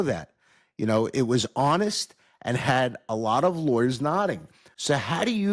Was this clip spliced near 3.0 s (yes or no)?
no